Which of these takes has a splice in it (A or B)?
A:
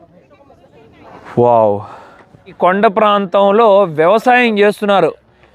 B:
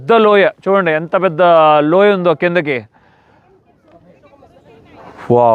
A